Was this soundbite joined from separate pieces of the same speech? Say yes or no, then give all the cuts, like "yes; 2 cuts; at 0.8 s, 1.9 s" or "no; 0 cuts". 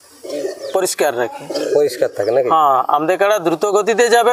no; 0 cuts